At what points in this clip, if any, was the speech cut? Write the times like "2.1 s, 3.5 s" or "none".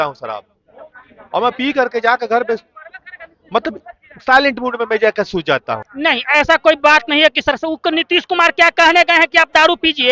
5.8 s